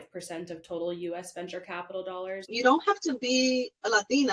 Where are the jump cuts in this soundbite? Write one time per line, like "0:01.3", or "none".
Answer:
0:02.5